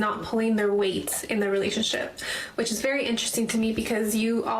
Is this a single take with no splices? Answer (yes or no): no